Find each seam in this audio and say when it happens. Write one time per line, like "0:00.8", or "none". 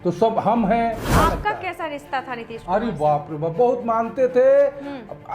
0:01.1